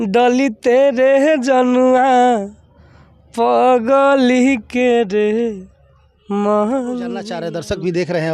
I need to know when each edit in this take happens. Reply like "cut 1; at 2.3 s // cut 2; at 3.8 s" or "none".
cut 1; at 7.4 s